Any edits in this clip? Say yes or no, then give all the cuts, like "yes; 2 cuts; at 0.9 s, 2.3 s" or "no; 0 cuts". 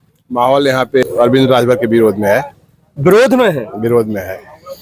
yes; 1 cut; at 1.0 s